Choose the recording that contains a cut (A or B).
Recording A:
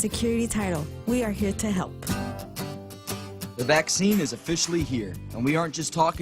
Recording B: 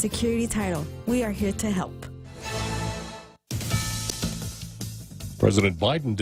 A